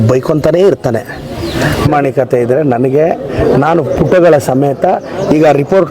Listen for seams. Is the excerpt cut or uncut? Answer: cut